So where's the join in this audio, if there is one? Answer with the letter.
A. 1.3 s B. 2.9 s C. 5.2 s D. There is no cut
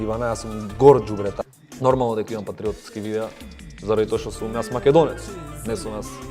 A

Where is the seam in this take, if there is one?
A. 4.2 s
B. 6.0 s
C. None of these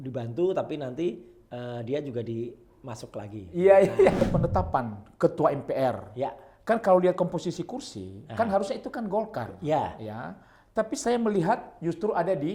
A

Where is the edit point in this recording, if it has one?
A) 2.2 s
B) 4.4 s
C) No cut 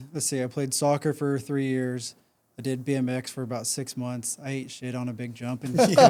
C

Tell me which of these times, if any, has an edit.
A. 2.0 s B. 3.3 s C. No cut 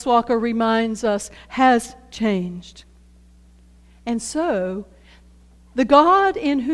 A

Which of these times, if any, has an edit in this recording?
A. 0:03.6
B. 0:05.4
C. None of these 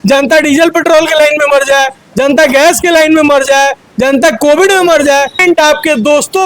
B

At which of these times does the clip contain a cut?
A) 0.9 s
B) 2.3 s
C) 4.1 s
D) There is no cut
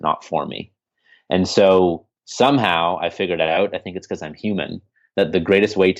D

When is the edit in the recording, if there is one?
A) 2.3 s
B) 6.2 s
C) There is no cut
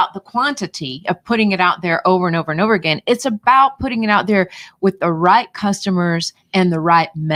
C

